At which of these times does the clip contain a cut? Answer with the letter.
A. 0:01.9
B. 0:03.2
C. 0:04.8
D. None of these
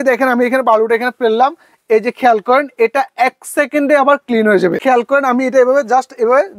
C